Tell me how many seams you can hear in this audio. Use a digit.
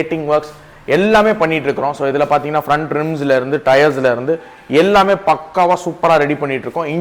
0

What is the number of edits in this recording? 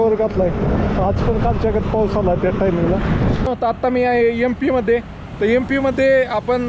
1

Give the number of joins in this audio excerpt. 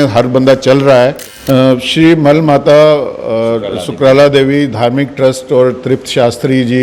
1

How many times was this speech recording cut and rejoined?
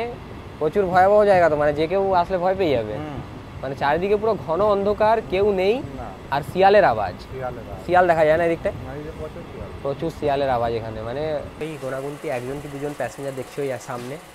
1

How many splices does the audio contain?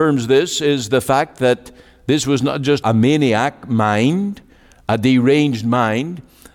1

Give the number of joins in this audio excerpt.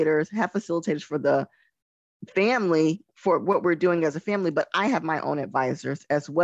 0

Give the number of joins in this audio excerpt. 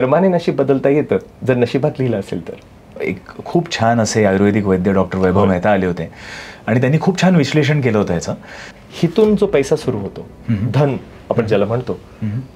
2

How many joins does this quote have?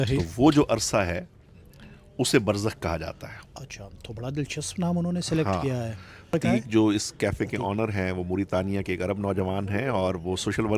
0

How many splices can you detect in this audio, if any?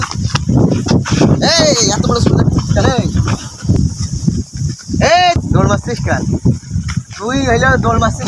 2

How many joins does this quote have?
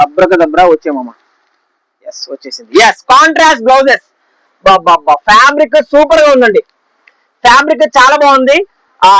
0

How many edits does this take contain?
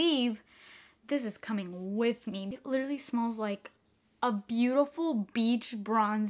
1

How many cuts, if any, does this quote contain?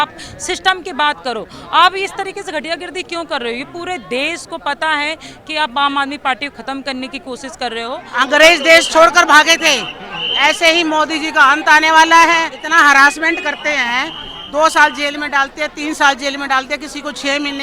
2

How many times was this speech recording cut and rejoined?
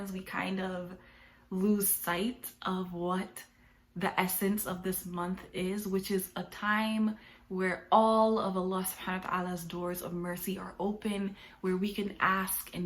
0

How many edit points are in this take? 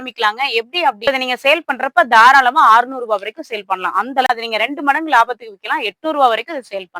2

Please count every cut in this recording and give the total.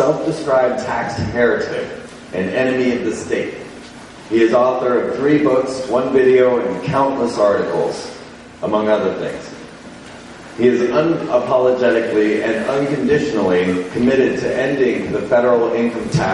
0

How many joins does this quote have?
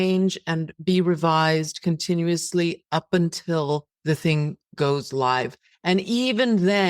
1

